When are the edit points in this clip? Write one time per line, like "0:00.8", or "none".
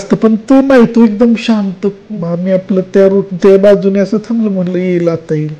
0:02.1